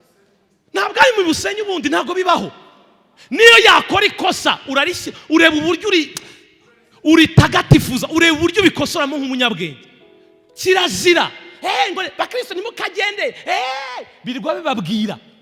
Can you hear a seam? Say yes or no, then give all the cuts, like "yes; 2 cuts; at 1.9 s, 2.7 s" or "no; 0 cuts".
no; 0 cuts